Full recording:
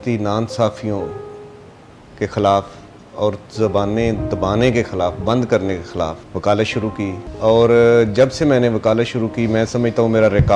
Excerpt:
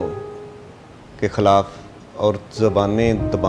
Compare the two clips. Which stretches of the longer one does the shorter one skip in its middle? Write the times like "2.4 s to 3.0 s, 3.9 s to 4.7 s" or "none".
none